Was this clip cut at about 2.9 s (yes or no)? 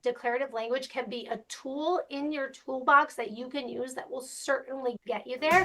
no